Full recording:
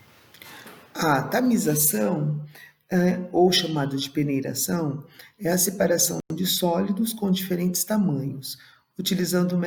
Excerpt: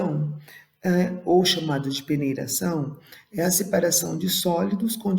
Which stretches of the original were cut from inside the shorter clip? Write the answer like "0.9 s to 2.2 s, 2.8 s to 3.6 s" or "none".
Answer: 6.2 s to 6.3 s